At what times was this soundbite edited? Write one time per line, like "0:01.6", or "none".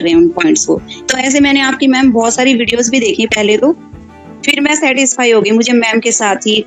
0:01.0